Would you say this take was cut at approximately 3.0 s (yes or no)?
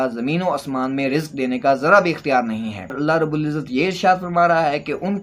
yes